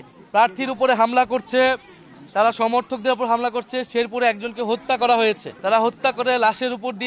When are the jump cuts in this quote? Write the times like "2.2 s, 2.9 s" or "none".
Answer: 5.5 s